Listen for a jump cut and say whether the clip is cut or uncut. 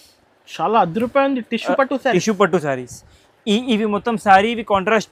uncut